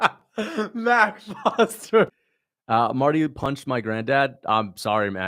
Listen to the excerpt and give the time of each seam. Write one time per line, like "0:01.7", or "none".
0:02.1